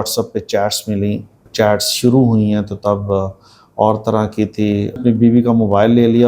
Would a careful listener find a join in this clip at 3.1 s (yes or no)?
no